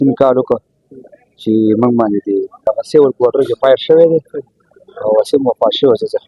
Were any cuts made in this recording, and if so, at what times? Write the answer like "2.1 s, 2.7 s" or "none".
2.6 s